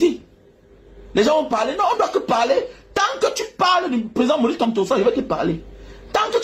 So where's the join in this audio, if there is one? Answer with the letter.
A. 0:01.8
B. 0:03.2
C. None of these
C